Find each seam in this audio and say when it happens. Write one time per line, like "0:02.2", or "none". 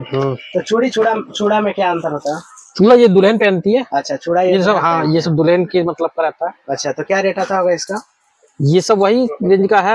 none